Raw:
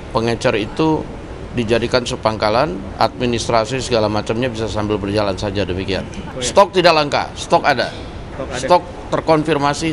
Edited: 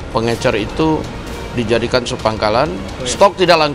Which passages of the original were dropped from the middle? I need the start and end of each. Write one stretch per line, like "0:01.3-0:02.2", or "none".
0:02.8-0:06.2